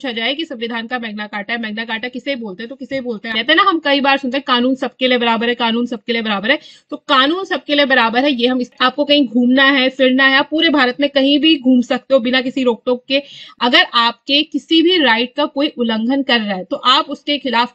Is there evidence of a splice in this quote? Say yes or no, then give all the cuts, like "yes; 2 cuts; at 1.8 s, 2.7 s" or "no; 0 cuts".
yes; 3 cuts; at 3.3 s, 8.7 s, 13.4 s